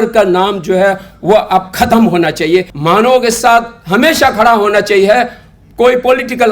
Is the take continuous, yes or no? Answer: no